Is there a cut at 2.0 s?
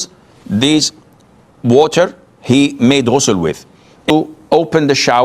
no; 1 cut; at 4.1 s

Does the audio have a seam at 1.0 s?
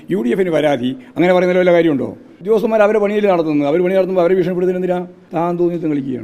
no; 2 cuts; at 2.4 s, 5.2 s

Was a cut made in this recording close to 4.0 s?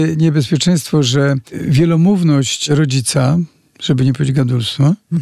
no; 2 cuts; at 1.6 s, 2.7 s

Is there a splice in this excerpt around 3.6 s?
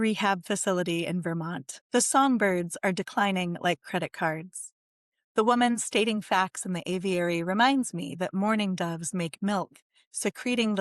no; 1 cut; at 1.7 s

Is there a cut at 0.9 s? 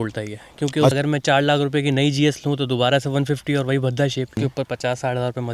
yes; 2 cuts; at 0.9 s, 4.4 s

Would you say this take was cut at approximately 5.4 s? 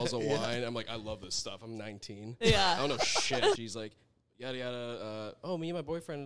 no; 1 cut; at 3.6 s

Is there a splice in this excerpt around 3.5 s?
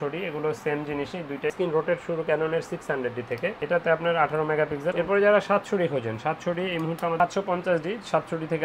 no; 3 cuts; at 1.5 s, 4.9 s, 7.2 s

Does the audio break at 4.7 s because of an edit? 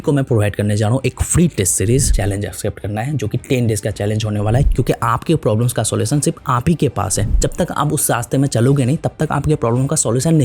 yes; 3 cuts; at 2.1 s, 4.7 s, 7.3 s

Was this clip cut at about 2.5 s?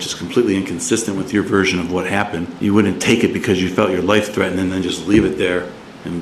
yes; 1 cut; at 2.5 s

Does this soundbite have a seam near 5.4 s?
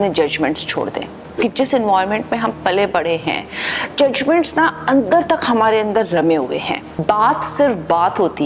no; 2 cuts; at 1.3 s, 6.9 s

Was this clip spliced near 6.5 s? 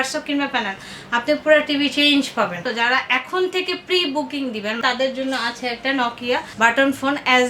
yes; 3 cuts; at 2.7 s, 4.8 s, 6.5 s

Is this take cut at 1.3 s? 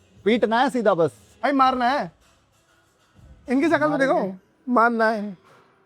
yes; 1 cut; at 1.3 s

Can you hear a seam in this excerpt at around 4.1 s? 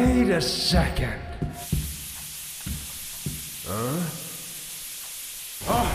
no; 1 cut; at 1.6 s

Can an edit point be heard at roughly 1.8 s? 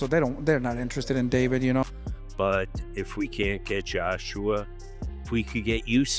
yes; 1 cut; at 1.8 s

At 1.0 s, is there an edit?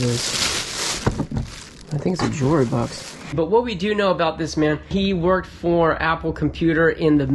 yes; 2 cuts; at 1.0 s, 3.3 s

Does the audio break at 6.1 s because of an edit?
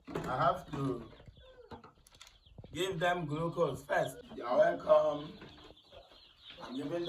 no; 1 cut; at 4.3 s

